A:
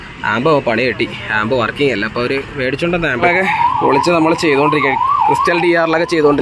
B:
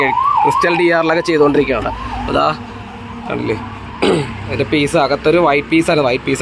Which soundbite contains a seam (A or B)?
A